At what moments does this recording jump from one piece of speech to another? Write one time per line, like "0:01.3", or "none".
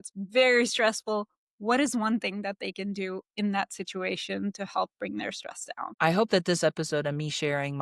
0:05.9